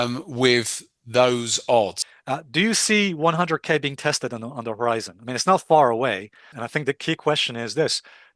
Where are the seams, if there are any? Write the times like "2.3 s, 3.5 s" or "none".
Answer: 2.0 s, 6.5 s